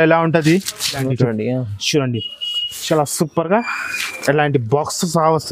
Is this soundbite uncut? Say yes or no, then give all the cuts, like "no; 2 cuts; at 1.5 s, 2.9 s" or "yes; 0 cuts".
no; 1 cut; at 1.1 s